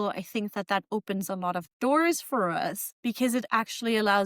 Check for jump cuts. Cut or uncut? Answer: cut